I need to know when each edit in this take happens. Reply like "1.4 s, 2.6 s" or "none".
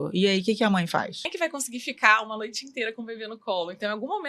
1.3 s